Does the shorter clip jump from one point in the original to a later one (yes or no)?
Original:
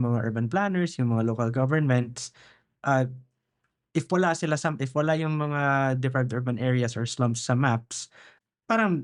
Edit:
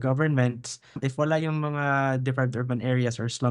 yes